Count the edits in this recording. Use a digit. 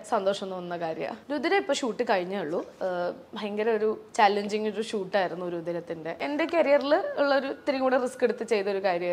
2